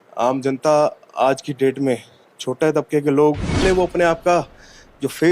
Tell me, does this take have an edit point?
yes; 1 cut; at 3.6 s

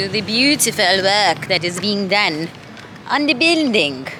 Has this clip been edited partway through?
no; 0 cuts

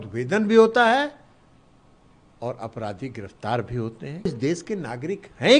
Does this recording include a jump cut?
yes; 1 cut; at 4.3 s

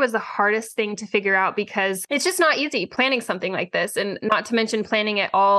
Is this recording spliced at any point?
yes; 3 cuts; at 2.0 s, 2.9 s, 4.2 s

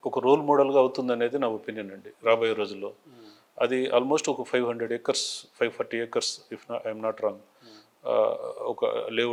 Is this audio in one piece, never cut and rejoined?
yes; 0 cuts

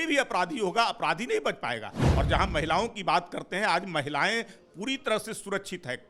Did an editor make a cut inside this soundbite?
no; 0 cuts

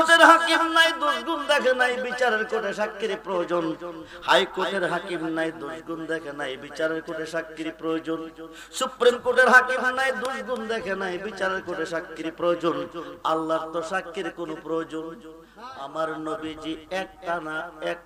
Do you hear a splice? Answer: yes; 1 cut; at 15.8 s

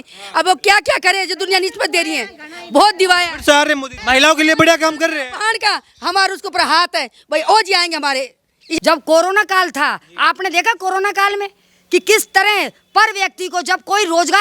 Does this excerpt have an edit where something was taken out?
yes; 2 cuts; at 3.9 s, 8.6 s

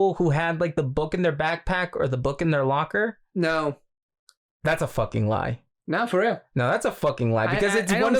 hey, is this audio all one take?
yes; 0 cuts

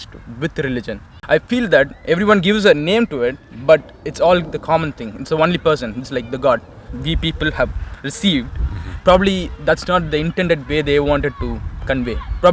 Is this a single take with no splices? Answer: no; 2 cuts; at 1.2 s, 6.8 s

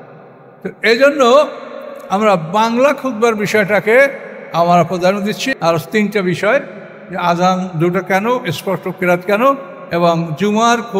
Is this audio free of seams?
no; 1 cut; at 5.4 s

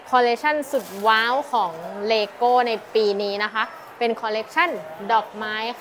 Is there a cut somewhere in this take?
no; 0 cuts

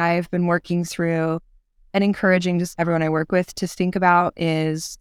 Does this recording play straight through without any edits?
no; 1 cut; at 2.7 s

